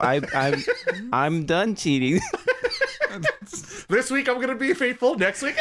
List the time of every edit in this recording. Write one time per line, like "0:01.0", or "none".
none